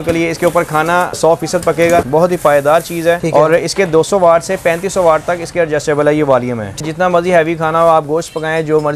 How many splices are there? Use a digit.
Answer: 3